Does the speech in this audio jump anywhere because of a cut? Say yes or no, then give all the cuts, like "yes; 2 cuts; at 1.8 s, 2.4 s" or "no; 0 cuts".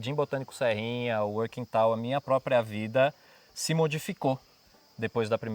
no; 0 cuts